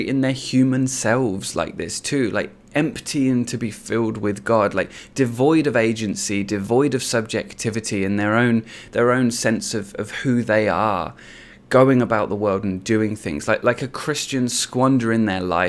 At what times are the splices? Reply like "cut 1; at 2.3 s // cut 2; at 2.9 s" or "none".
none